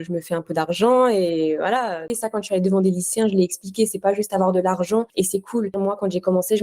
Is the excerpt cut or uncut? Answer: cut